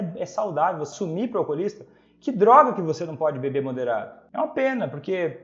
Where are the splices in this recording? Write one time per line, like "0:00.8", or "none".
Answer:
0:00.9
0:04.2